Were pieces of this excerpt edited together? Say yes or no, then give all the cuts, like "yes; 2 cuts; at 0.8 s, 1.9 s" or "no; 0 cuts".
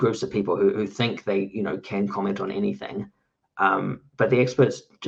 no; 0 cuts